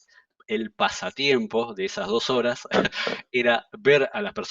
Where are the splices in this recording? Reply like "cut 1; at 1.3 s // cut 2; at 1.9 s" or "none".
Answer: none